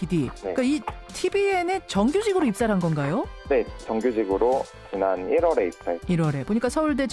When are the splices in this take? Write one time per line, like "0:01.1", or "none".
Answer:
none